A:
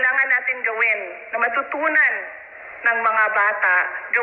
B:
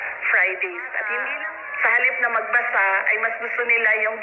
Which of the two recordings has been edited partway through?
B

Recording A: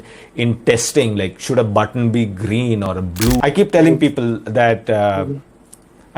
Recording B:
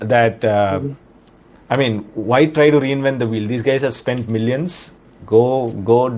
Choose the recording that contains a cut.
A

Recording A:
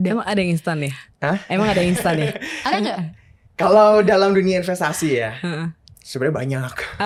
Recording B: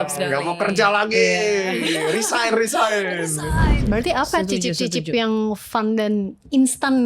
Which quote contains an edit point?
B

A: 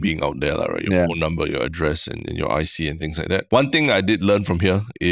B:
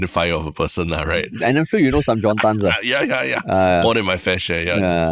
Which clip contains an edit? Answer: A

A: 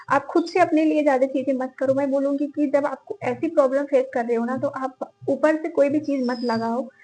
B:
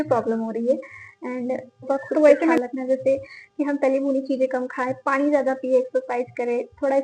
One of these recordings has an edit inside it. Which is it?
B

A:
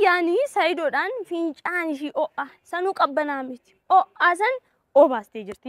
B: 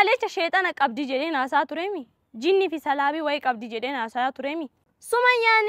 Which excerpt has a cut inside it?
B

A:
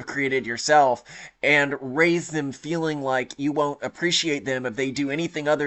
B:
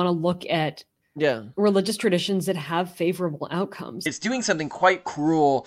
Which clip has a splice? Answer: B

